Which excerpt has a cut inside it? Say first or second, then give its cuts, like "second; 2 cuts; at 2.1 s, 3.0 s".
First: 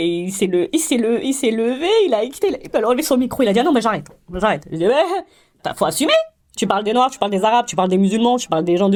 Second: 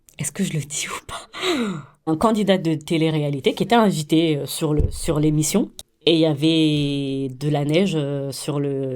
second; 2 cuts; at 2.1 s, 5.8 s